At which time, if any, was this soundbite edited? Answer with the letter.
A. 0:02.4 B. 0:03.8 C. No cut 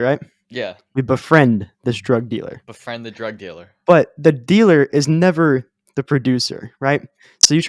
B